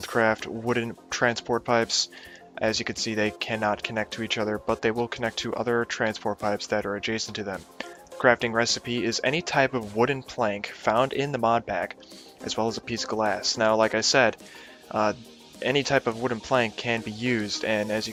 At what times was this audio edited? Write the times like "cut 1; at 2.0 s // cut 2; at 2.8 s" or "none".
none